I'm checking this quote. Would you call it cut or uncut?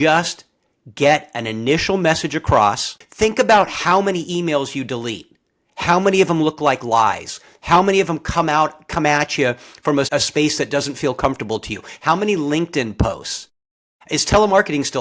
cut